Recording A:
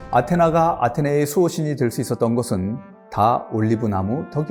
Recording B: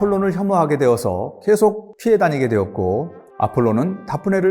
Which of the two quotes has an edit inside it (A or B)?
B